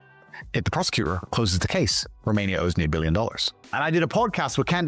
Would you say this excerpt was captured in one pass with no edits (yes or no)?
no